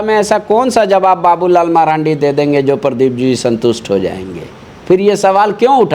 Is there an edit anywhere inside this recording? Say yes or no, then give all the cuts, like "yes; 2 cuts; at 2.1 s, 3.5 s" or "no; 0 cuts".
no; 0 cuts